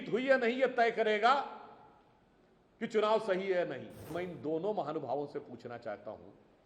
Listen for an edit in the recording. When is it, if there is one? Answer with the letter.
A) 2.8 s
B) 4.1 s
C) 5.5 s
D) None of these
B